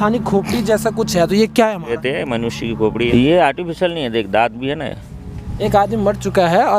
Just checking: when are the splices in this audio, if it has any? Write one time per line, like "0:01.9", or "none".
0:02.0
0:03.1
0:05.5